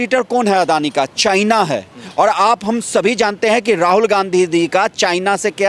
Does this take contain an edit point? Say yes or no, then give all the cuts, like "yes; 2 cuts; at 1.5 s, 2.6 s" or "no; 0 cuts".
no; 0 cuts